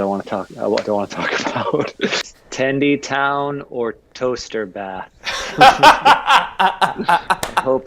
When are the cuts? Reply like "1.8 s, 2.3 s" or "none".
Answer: 2.3 s